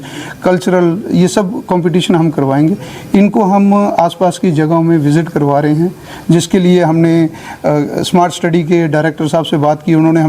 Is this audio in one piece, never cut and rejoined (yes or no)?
yes